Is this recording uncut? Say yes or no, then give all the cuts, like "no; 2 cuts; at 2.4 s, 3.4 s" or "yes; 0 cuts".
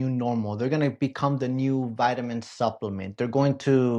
yes; 0 cuts